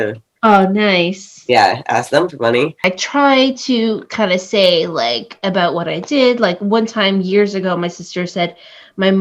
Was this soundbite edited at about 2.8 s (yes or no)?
yes